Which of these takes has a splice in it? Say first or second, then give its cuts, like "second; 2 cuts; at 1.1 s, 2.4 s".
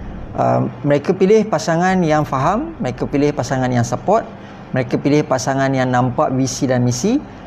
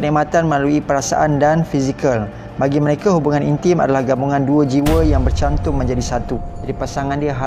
second; 1 cut; at 6.6 s